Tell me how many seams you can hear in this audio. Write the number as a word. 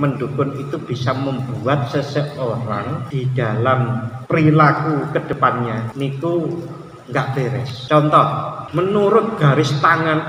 five